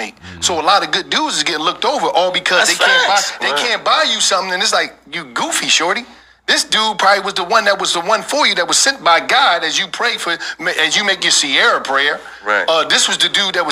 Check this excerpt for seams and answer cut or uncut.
uncut